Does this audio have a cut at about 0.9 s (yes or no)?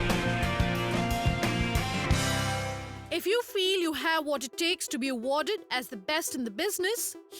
no